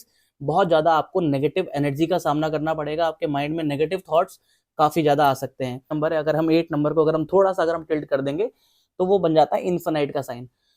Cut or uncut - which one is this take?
cut